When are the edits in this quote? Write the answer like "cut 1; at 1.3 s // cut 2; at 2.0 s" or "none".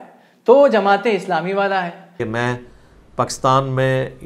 cut 1; at 2.2 s